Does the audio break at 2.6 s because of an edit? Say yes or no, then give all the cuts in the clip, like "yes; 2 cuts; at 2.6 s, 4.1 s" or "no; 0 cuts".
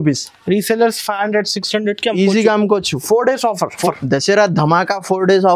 no; 1 cut; at 3.8 s